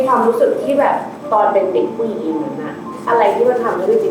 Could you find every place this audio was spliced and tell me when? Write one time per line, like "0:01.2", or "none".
0:02.9

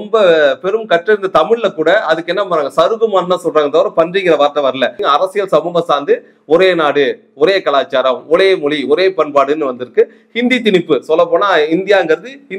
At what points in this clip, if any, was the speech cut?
0:05.0

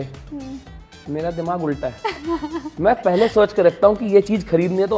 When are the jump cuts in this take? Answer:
none

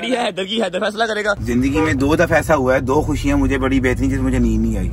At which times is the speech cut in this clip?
0:01.4

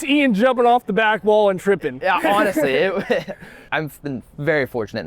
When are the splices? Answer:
0:03.7

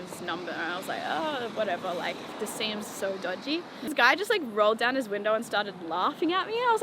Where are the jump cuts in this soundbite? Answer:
0:03.9

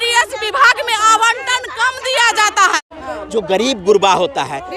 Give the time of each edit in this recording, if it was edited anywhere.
0:03.2

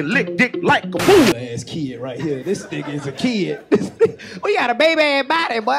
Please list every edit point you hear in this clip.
0:01.3

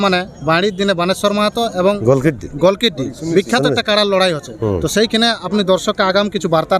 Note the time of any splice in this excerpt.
0:02.0

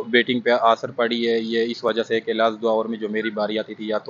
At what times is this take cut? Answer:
none

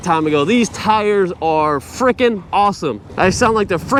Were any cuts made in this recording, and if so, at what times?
none

